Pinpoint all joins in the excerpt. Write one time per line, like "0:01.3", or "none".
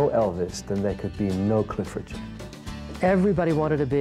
0:02.7